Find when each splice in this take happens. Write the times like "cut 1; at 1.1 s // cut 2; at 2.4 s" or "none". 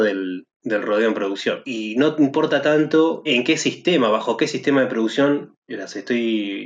cut 1; at 1.7 s // cut 2; at 3.3 s